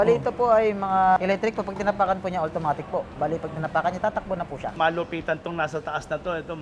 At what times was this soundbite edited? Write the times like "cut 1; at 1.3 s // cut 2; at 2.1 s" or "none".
cut 1; at 1.2 s // cut 2; at 4.7 s